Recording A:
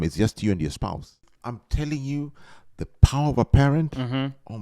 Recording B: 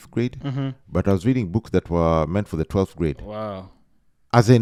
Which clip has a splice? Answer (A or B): A